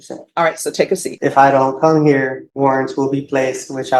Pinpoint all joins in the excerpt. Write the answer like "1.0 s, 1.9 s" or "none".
1.0 s, 2.4 s